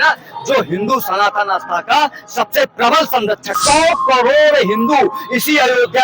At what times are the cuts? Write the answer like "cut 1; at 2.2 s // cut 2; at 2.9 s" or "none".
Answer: cut 1; at 3.6 s